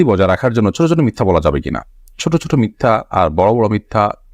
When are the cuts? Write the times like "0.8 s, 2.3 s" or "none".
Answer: none